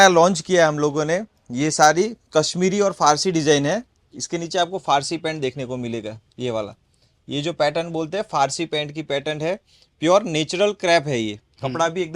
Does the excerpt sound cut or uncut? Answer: uncut